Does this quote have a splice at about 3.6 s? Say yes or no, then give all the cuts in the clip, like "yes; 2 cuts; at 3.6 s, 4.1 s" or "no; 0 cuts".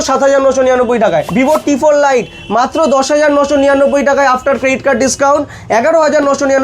no; 1 cut; at 1.3 s